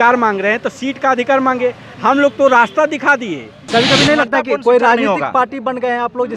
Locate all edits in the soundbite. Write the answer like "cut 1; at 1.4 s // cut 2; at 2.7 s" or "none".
cut 1; at 3.7 s